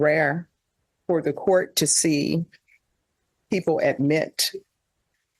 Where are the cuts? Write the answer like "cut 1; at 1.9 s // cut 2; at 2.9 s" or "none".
none